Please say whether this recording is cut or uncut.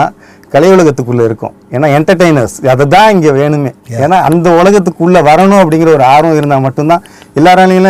uncut